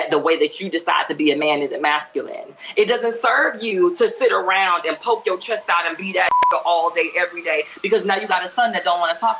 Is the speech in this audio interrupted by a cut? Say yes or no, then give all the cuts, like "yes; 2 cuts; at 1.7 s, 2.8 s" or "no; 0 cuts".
no; 0 cuts